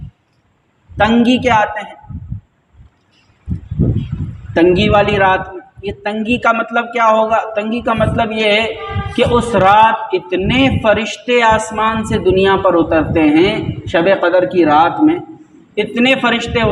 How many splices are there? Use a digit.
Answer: 0